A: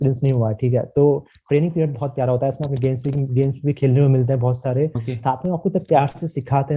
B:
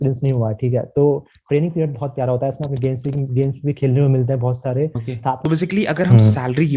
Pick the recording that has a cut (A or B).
B